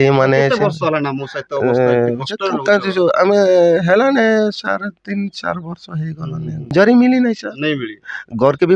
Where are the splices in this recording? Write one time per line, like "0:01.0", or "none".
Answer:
0:06.6